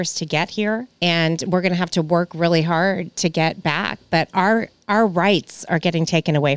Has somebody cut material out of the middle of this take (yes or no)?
yes